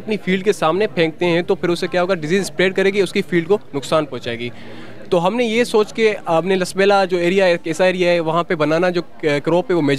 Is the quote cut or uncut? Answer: uncut